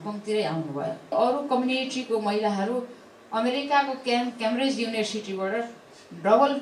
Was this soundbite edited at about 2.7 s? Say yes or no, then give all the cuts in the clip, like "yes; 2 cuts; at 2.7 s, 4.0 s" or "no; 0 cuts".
no; 1 cut; at 1.1 s